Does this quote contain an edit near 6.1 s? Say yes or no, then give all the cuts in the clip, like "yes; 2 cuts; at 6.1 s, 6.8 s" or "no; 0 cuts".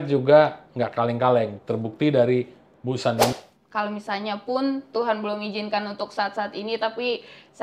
no; 1 cut; at 3.3 s